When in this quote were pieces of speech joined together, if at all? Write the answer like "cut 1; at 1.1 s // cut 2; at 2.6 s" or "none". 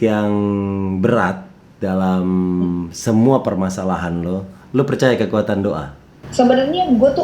cut 1; at 6.2 s